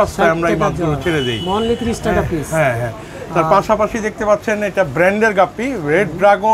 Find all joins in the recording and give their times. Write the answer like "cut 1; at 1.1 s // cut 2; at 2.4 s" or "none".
none